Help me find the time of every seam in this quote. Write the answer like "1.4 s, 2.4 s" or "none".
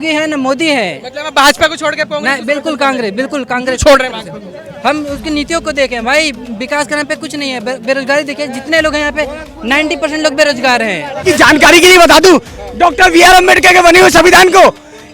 11.2 s